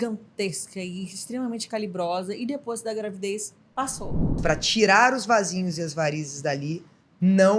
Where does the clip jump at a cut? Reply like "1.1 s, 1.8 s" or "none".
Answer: 4.3 s